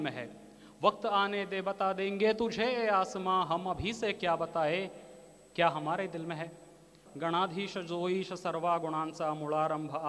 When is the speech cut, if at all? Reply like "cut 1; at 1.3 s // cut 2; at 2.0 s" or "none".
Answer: cut 1; at 7.0 s